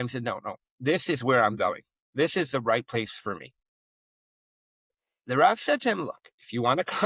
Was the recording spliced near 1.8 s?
no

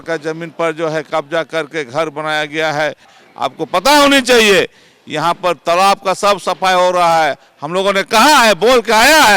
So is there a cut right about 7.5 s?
no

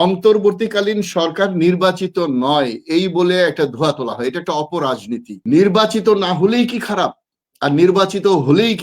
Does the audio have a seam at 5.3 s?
yes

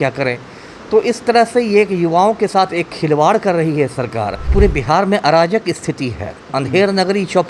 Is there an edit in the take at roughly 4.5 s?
yes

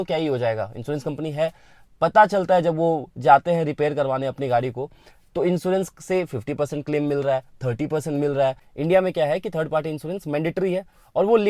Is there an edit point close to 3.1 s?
no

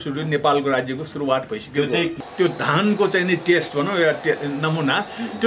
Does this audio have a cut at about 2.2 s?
yes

